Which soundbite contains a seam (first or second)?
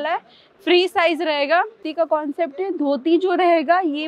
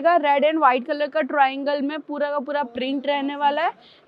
first